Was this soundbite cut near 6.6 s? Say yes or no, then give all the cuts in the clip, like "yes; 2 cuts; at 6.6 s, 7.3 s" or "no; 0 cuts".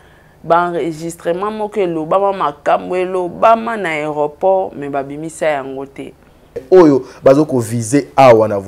yes; 1 cut; at 6.6 s